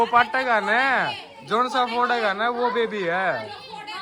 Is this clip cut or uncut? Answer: uncut